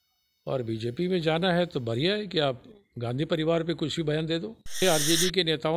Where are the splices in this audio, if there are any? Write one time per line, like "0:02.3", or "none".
0:04.8